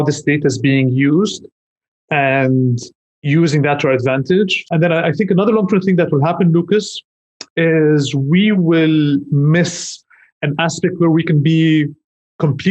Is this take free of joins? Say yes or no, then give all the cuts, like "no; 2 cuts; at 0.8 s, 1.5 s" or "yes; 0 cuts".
no; 1 cut; at 4.6 s